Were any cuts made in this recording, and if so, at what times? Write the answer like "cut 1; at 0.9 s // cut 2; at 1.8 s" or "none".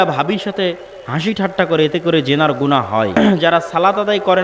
cut 1; at 3.2 s